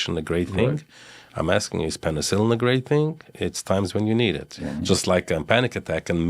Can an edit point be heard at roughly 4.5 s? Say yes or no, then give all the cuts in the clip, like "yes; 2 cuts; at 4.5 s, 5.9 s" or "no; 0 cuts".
yes; 1 cut; at 4.5 s